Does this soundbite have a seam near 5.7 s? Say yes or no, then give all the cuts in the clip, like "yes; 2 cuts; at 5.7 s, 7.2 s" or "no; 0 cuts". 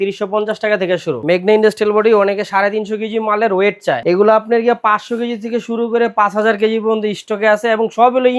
no; 2 cuts; at 1.2 s, 4.0 s